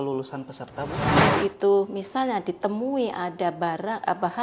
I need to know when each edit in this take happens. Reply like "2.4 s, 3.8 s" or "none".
1.2 s

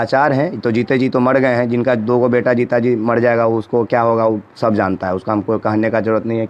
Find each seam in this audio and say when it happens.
none

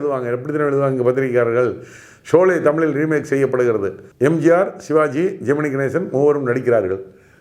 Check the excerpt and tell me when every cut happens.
4.0 s

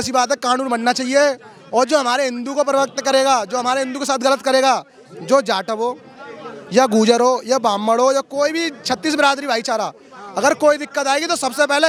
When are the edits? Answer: none

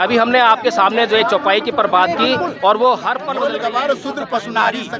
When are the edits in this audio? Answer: 3.2 s

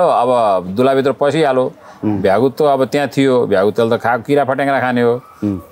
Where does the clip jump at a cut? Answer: none

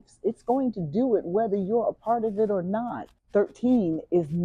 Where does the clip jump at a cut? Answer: 3.2 s

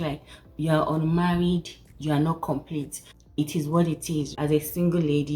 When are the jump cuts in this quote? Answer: 3.0 s, 4.3 s

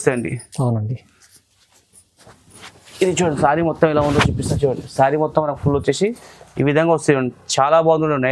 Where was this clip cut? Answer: none

